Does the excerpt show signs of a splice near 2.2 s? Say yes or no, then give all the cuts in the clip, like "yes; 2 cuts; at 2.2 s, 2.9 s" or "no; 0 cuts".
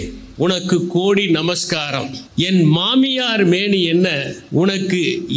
yes; 2 cuts; at 2.2 s, 4.3 s